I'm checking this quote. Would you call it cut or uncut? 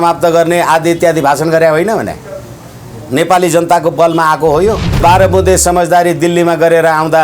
cut